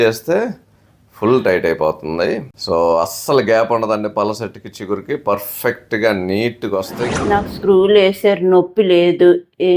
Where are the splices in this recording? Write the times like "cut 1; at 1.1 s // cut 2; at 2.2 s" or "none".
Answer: cut 1; at 2.5 s // cut 2; at 7.0 s

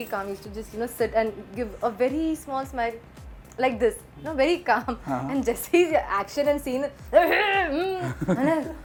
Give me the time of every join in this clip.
none

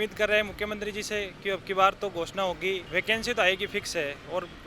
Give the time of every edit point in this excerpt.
cut 1; at 2.8 s

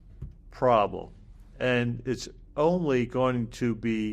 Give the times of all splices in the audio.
none

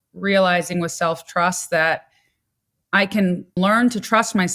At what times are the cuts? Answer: cut 1; at 3.5 s

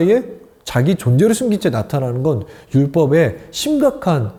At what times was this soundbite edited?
none

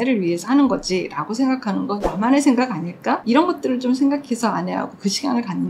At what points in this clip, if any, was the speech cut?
cut 1; at 2.0 s // cut 2; at 3.2 s

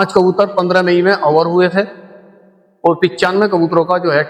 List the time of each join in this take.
none

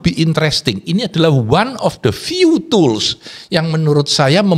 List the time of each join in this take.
none

